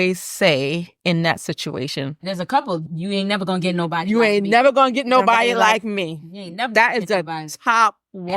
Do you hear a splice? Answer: no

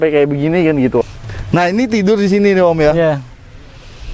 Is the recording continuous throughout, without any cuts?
no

